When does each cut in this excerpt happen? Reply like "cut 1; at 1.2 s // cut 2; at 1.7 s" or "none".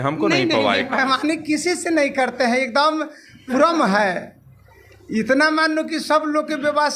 none